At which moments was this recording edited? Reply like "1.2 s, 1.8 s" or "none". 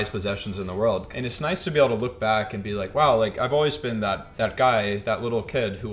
1.1 s, 4.2 s

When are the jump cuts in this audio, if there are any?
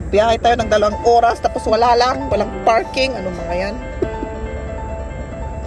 none

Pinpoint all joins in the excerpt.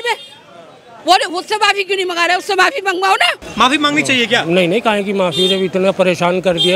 3.4 s

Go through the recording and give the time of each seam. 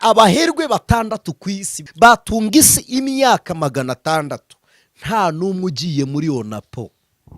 1.7 s

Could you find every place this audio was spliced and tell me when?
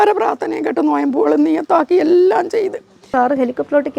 3.0 s

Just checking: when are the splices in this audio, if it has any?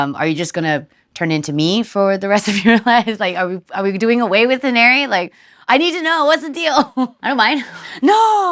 7.5 s

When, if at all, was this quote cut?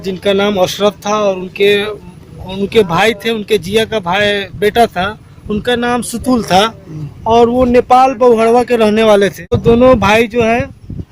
9.6 s

